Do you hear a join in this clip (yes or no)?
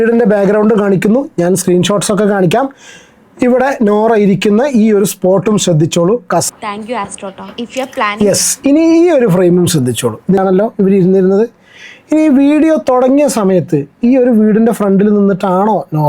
yes